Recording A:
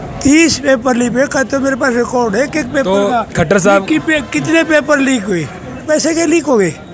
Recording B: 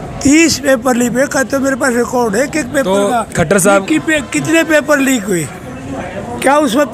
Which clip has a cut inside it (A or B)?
A